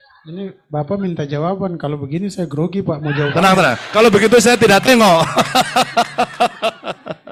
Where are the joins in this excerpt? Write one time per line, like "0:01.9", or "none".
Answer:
none